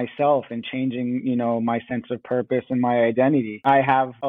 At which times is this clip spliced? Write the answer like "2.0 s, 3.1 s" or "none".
none